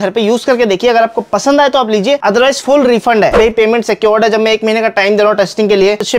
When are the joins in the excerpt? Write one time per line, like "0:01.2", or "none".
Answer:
0:03.3